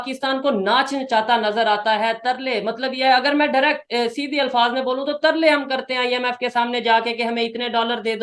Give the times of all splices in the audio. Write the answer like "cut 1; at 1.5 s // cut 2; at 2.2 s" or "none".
none